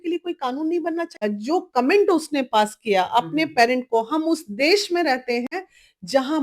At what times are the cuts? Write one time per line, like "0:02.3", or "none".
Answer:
0:01.2